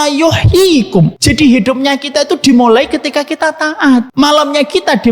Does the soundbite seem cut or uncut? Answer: cut